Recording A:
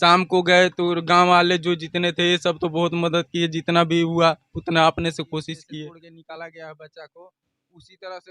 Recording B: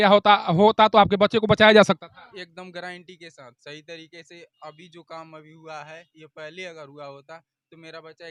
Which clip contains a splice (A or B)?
A